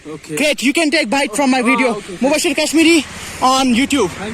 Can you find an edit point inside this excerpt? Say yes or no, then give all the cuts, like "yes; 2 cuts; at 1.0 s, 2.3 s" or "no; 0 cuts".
no; 0 cuts